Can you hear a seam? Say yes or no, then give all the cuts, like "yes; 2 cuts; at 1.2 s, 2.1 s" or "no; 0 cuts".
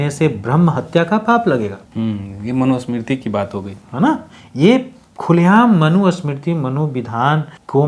no; 0 cuts